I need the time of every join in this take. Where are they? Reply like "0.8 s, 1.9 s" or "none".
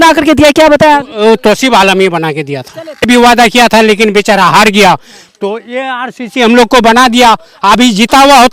3.0 s